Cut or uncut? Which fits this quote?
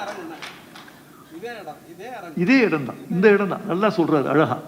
uncut